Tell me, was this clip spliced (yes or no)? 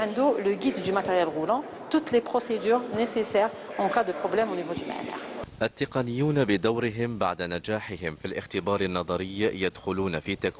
no